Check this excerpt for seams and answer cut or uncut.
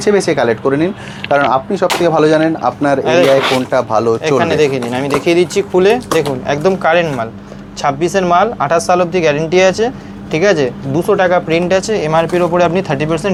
uncut